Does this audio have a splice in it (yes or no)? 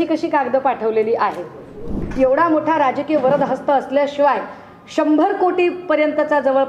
yes